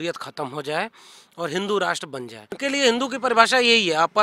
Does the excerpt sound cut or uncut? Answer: cut